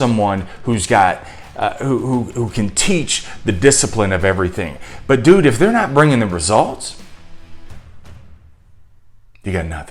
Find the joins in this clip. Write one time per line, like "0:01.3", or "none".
none